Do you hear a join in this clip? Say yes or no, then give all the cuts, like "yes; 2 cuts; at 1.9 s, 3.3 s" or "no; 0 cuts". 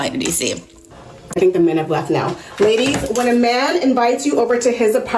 yes; 1 cut; at 1.1 s